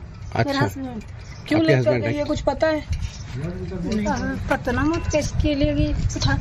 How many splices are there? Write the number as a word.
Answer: one